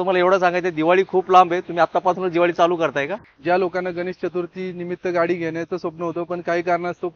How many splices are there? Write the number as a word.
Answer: zero